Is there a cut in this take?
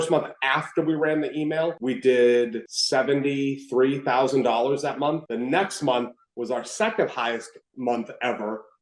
no; 0 cuts

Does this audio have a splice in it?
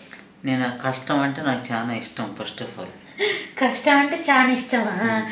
no; 0 cuts

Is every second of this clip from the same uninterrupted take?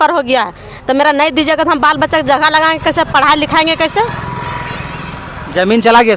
yes; 0 cuts

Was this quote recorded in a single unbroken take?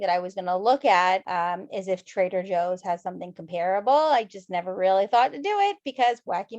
no; 1 cut; at 1.3 s

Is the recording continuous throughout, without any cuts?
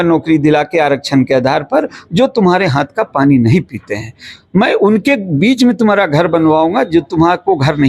yes; 0 cuts

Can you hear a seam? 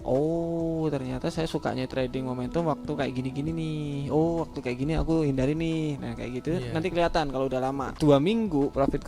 yes; 2 cuts; at 1.9 s, 7.9 s

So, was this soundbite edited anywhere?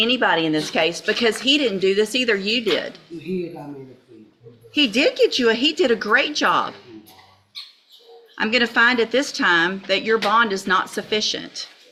no; 0 cuts

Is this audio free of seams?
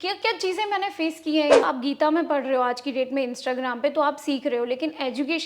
no; 1 cut; at 1.6 s

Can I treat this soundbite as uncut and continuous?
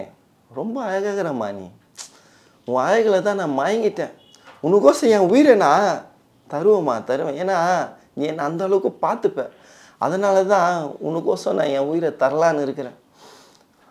yes; 0 cuts

